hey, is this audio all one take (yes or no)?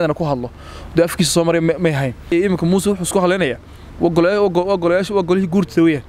no